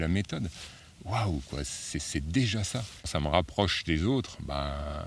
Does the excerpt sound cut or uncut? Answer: cut